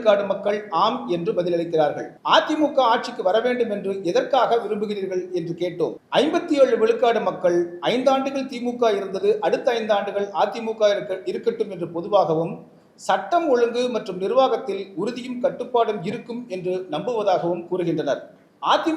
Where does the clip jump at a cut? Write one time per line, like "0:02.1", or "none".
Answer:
0:02.1
0:06.0